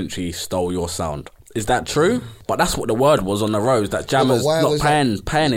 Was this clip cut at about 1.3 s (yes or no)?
yes